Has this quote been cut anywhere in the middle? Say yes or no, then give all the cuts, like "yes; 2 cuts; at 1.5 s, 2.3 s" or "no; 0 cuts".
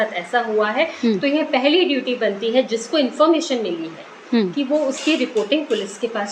no; 0 cuts